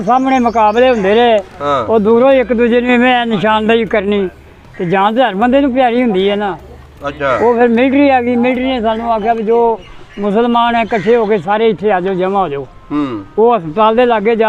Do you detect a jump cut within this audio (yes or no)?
no